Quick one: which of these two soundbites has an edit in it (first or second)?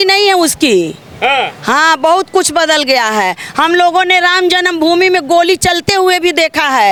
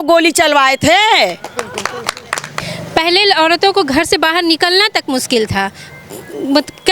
second